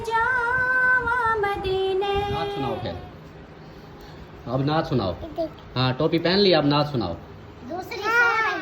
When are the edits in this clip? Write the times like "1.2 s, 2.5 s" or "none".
2.6 s